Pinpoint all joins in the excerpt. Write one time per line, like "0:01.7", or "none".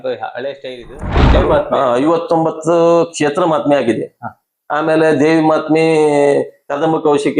0:01.2